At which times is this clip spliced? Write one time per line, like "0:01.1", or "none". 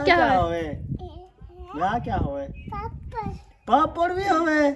none